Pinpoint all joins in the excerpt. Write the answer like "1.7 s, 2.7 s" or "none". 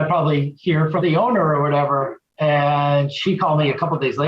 1.0 s, 2.2 s